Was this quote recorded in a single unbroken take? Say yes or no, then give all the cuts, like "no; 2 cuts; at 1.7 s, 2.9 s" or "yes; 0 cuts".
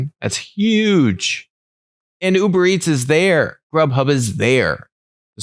yes; 0 cuts